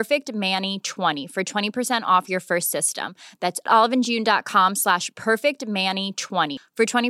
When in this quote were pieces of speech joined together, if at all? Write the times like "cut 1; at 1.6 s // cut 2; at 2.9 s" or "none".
cut 1; at 1.2 s